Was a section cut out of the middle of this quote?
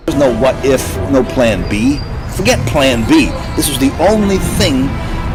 no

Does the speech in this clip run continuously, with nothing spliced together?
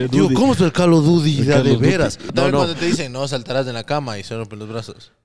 no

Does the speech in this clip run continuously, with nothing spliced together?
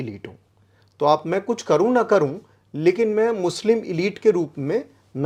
yes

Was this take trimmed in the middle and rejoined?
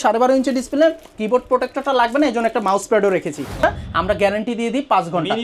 yes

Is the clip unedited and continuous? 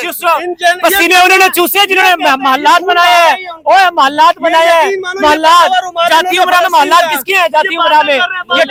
yes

